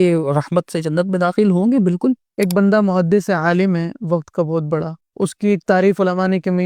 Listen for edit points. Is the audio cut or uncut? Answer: cut